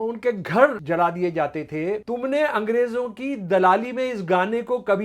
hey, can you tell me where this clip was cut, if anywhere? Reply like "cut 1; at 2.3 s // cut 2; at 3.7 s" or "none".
cut 1; at 0.8 s // cut 2; at 2.0 s